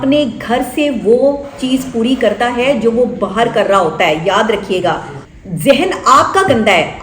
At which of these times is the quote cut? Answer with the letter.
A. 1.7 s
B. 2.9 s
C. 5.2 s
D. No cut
C